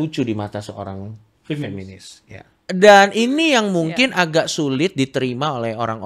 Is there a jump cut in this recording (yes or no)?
yes